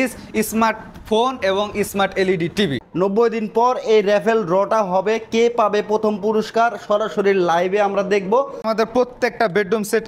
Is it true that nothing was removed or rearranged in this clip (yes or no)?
no